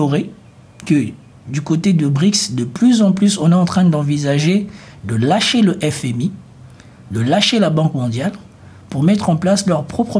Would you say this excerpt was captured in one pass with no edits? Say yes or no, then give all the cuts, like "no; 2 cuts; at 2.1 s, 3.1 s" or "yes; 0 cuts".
yes; 0 cuts